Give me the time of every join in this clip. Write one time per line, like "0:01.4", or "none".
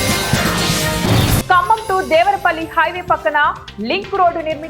0:01.4